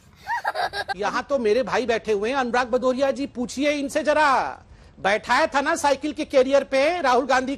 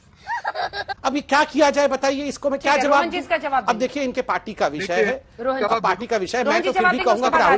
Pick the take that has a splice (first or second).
first